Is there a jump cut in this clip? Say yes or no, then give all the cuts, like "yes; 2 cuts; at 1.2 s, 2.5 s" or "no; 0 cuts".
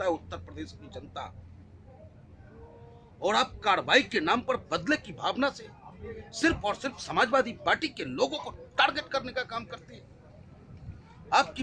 no; 0 cuts